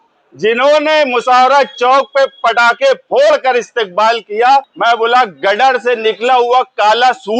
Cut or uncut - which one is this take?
cut